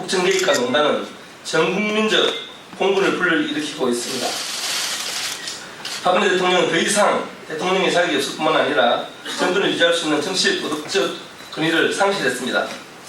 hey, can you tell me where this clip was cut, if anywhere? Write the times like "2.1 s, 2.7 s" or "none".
9.5 s

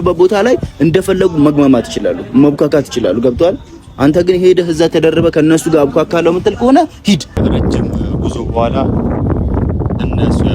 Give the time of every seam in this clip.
7.3 s

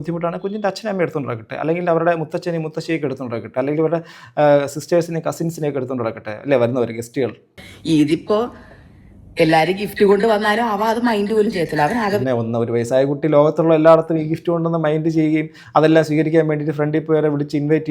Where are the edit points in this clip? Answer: 7.7 s

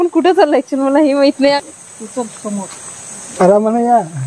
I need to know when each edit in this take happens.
none

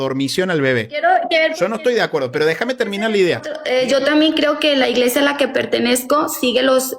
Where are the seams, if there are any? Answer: 3.6 s

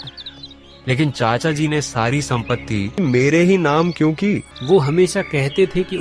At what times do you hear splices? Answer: 3.0 s, 4.5 s

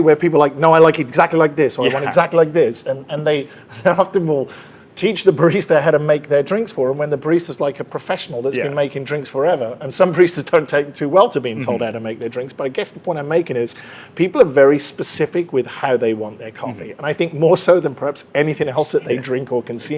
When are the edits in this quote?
none

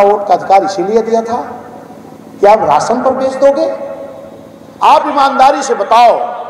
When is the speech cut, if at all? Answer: none

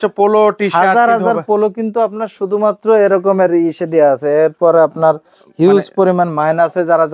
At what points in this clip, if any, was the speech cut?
none

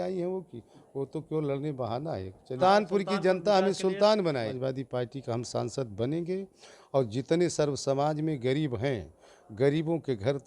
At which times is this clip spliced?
2.6 s, 4.5 s

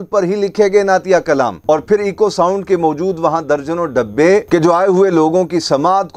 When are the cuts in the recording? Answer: none

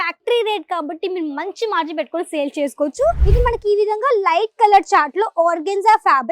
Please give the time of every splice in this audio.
3.2 s

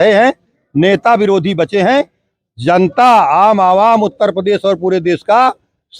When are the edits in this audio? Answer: none

